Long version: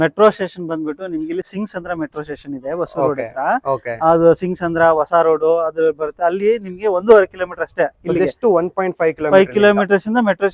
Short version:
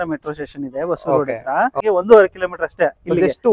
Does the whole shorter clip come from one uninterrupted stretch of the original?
no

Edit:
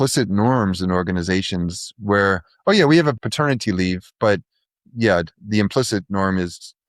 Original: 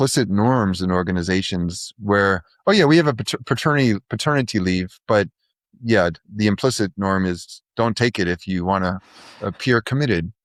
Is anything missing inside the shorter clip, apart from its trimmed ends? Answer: yes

